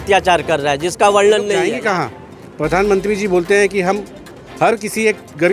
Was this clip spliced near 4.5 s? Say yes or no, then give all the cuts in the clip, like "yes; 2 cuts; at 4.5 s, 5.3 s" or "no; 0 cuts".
no; 1 cut; at 1.7 s